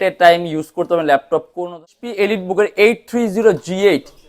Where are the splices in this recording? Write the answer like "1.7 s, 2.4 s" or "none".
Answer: 1.9 s